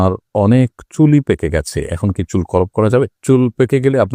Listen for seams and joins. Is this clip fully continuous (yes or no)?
yes